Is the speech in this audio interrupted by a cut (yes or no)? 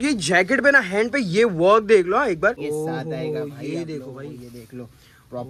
yes